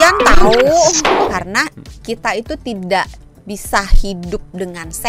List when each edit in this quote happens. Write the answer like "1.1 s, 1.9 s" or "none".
1.3 s